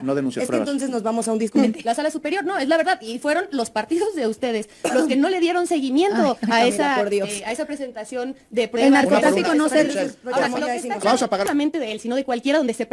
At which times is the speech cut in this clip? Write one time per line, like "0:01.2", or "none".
0:01.5
0:11.5